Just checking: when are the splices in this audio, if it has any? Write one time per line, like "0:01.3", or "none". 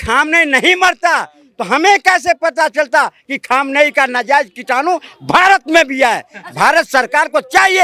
none